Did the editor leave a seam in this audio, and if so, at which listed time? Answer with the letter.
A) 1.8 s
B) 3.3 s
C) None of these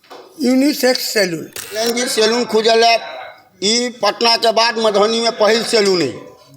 A